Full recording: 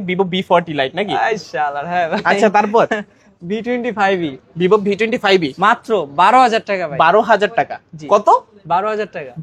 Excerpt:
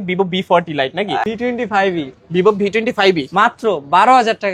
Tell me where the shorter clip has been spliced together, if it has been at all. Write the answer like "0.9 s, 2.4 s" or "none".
1.2 s